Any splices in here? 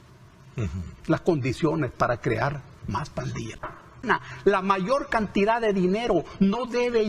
yes; 1 cut; at 4.0 s

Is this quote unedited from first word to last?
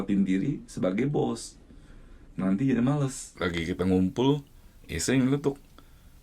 no; 1 cut; at 3.2 s

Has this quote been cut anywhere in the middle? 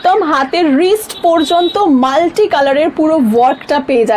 no; 0 cuts

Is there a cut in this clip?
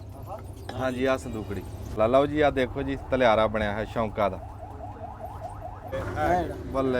yes; 2 cuts; at 2.0 s, 5.9 s

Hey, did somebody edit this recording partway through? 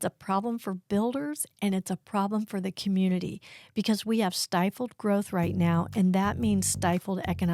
no; 0 cuts

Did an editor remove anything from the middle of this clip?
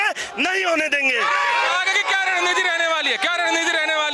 no; 0 cuts

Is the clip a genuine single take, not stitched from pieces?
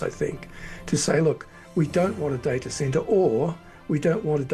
yes; 0 cuts

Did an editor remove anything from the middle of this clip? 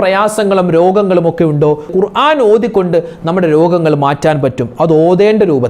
yes; 1 cut; at 1.9 s

